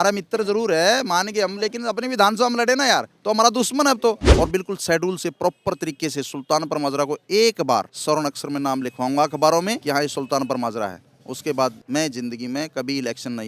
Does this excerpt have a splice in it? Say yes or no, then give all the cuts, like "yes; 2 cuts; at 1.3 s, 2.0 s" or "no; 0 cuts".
yes; 4 cuts; at 4.3 s, 7.9 s, 9.8 s, 11.8 s